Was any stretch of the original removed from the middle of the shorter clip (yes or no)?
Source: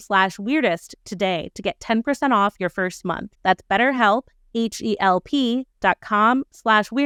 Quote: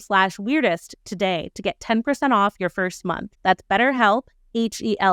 no